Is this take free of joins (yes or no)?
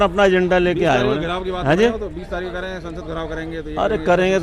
yes